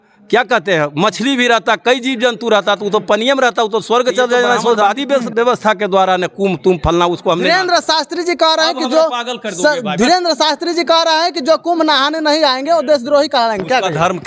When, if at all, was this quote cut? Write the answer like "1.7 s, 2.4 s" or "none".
4.9 s